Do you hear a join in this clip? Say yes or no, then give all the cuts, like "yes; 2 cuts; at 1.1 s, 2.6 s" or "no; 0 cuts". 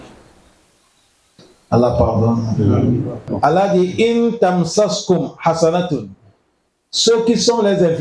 yes; 1 cut; at 3.3 s